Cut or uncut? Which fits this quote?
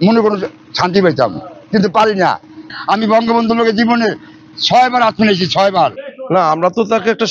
cut